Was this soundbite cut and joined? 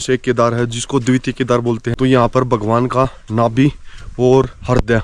yes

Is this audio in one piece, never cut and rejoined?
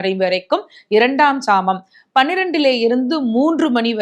yes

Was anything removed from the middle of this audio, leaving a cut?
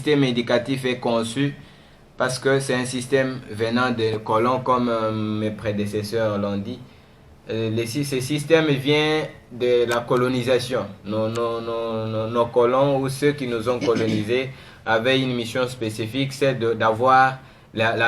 no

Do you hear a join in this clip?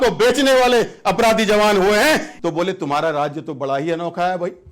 yes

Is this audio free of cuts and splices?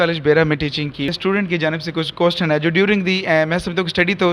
no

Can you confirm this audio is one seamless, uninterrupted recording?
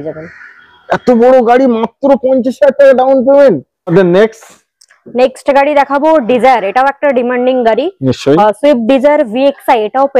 yes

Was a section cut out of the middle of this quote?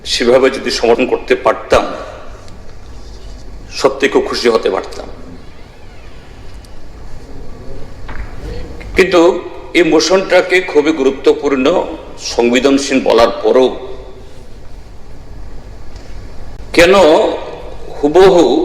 yes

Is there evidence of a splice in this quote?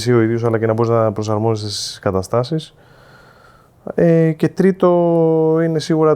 no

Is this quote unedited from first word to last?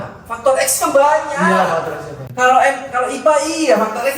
yes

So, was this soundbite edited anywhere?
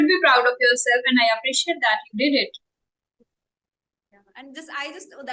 no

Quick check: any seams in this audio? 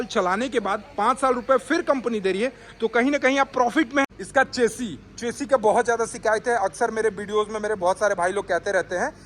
yes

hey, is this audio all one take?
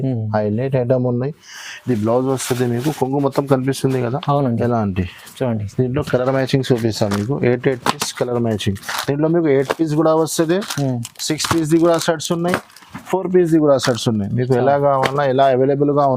yes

